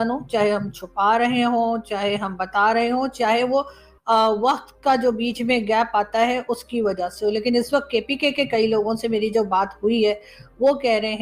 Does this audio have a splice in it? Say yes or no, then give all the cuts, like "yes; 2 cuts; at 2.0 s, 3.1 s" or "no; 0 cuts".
no; 0 cuts